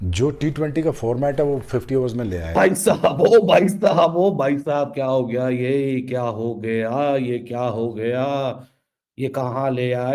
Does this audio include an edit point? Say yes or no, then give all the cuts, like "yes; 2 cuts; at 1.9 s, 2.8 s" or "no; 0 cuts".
yes; 1 cut; at 2.5 s